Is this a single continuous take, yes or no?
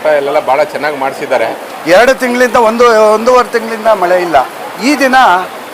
no